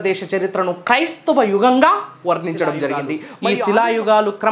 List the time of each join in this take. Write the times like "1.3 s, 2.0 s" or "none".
3.3 s